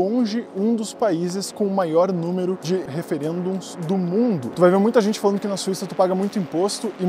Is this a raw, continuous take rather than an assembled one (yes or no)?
no